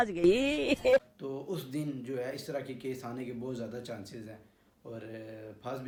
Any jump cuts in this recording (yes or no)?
no